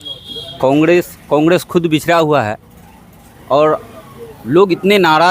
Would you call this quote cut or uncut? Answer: uncut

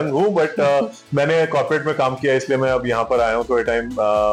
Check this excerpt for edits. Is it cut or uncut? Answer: uncut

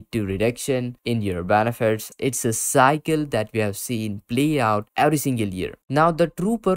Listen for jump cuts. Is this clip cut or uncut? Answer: cut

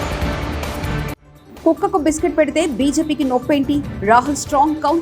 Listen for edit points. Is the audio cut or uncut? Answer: cut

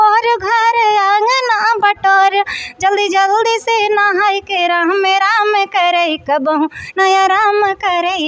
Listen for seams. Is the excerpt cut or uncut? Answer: uncut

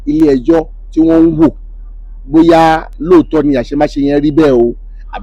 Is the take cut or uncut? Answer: uncut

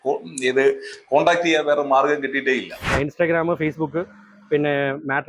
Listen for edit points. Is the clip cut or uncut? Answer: cut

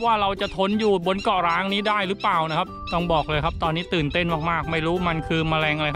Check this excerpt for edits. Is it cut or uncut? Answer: cut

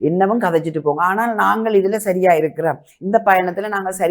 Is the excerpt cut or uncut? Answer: uncut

